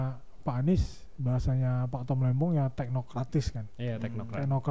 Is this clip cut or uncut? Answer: uncut